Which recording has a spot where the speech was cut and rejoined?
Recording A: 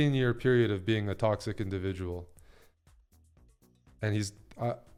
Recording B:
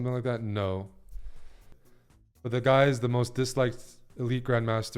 B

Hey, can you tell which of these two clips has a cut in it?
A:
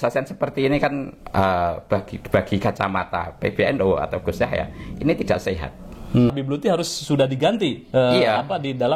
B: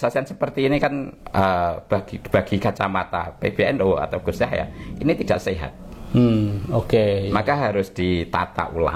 A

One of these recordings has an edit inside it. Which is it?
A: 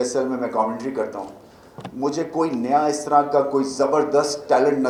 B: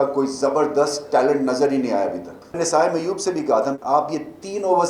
B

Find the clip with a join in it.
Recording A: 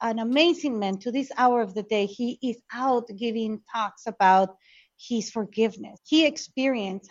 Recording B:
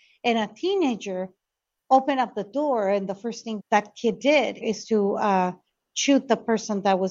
B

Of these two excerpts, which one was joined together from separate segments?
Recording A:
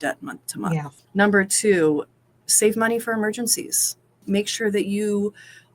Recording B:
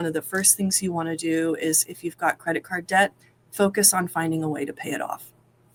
A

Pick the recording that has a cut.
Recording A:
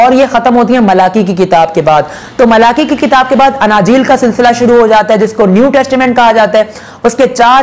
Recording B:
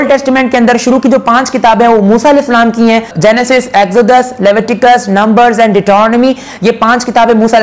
B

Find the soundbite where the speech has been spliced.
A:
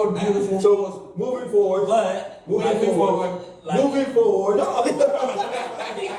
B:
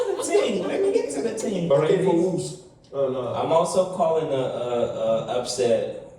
B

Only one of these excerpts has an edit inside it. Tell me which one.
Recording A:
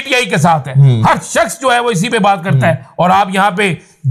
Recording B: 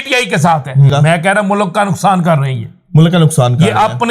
B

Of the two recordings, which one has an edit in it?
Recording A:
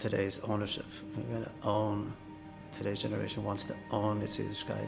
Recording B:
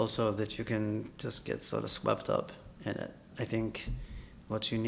B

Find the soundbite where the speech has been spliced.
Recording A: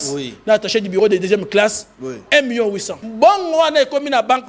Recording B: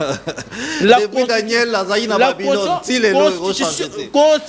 A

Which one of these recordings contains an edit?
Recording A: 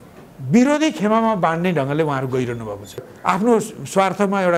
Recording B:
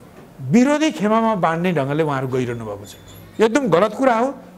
A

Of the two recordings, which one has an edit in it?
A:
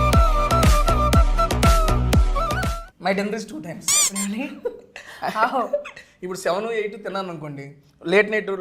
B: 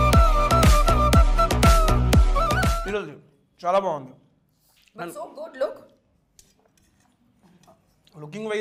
A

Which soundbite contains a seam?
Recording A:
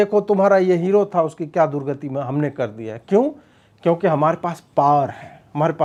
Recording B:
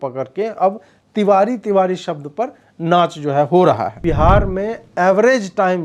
B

